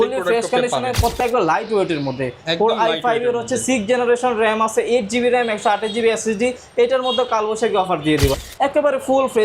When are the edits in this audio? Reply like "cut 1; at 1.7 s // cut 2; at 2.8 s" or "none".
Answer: cut 1; at 1.2 s // cut 2; at 8.4 s